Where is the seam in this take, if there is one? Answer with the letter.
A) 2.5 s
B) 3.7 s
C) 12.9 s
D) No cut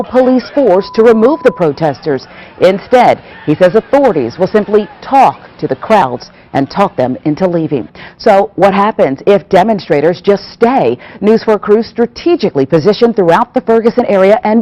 B